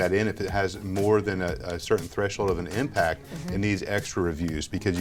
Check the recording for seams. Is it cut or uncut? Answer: uncut